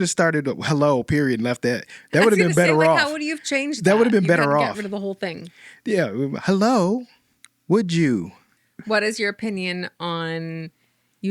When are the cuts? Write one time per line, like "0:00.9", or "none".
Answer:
0:08.7